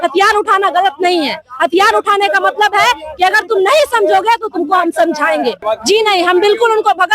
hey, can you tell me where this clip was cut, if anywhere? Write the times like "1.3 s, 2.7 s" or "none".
5.6 s

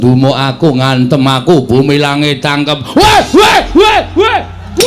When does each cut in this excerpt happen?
none

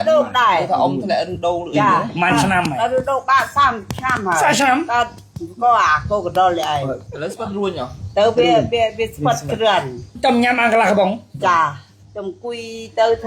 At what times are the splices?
7.0 s, 10.2 s, 12.0 s

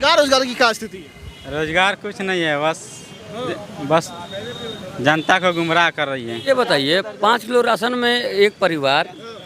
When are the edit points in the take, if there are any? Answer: 6.5 s

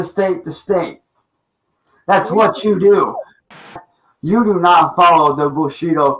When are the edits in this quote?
3.7 s

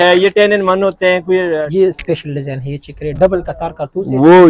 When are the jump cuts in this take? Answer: 1.5 s

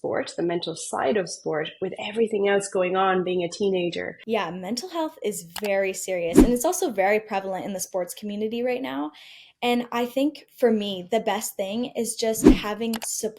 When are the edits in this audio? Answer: 4.1 s

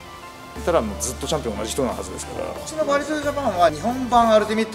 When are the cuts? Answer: 2.6 s, 3.8 s

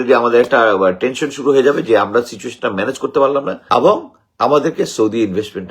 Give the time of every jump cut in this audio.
3.6 s

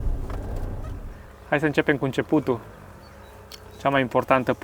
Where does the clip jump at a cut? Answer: 1.1 s

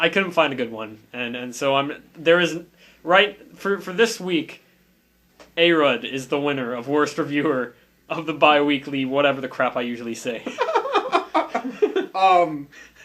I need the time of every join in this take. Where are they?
none

